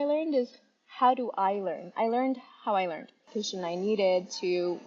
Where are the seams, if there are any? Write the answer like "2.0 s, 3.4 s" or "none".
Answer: 3.2 s